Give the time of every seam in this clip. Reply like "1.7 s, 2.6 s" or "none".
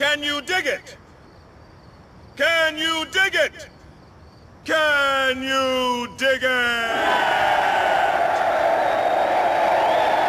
none